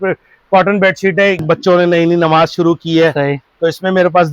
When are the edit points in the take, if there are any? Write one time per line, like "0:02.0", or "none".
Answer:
0:01.4